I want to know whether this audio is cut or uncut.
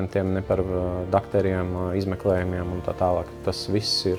uncut